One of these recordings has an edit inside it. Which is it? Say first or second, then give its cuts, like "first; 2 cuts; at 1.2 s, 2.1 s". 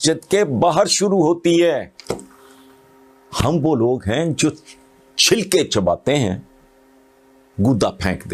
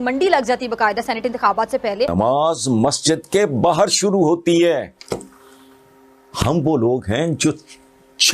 second; 1 cut; at 2.1 s